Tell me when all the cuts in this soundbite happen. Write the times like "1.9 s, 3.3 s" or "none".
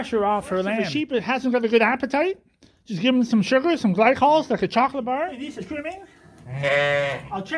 1.0 s, 5.4 s